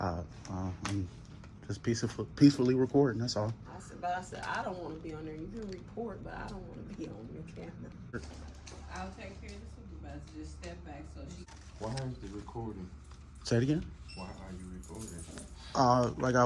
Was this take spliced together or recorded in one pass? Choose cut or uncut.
cut